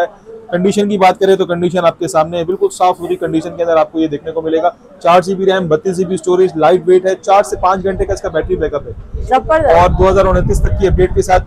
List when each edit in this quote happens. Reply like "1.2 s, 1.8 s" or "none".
none